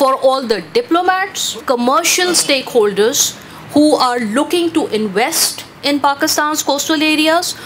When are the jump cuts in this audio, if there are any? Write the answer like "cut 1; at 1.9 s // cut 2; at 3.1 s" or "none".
cut 1; at 1.6 s